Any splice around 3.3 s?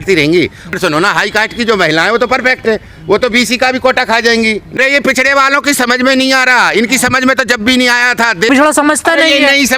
no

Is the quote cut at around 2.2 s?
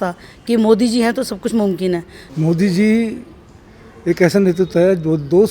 yes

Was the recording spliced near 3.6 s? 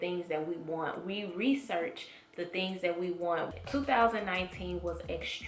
yes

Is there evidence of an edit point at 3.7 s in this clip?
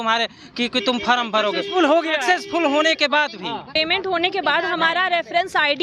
yes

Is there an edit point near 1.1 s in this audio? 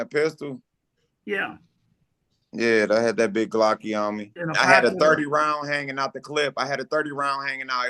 no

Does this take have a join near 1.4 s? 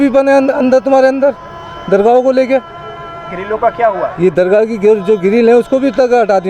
no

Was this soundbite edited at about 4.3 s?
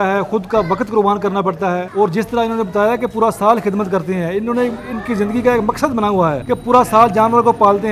no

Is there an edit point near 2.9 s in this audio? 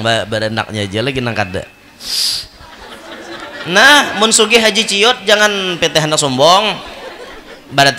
yes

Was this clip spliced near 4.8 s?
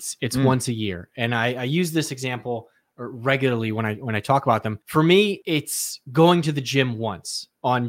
yes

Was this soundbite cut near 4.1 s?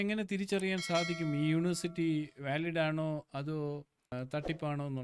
yes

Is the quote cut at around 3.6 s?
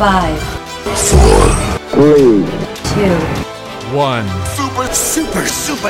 no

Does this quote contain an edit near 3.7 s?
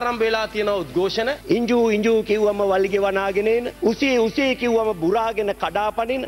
no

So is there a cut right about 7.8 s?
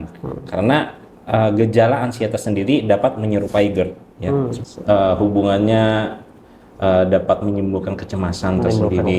no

